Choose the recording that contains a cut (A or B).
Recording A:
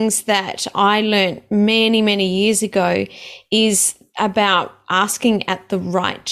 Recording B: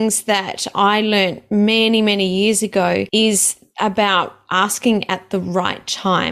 B